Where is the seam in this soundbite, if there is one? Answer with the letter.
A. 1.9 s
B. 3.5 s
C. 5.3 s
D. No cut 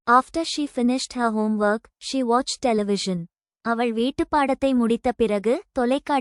D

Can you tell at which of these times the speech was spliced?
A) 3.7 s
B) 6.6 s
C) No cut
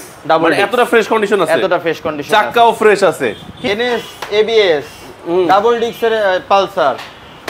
A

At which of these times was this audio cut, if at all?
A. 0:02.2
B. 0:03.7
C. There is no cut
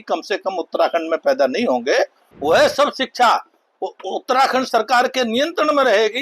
A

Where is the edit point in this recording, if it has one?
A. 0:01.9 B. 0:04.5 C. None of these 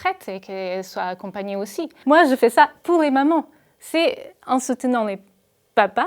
A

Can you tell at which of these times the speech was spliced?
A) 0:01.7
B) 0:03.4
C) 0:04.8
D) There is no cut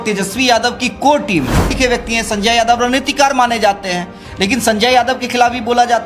A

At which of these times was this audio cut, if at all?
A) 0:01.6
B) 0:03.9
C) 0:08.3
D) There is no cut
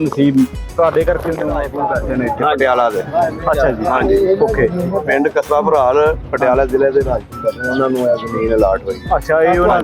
A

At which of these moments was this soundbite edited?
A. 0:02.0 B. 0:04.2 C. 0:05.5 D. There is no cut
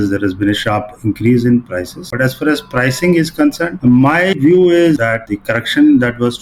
A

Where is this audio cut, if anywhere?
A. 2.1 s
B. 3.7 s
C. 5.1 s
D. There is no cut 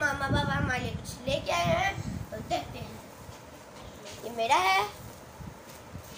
D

